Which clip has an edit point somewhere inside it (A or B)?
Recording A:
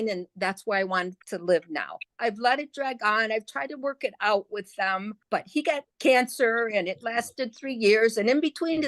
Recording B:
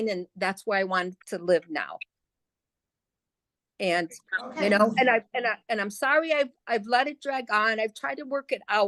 A